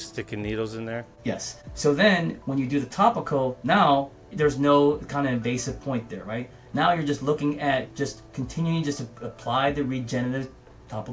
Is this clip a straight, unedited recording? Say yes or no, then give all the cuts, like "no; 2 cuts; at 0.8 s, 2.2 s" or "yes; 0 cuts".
no; 1 cut; at 1.3 s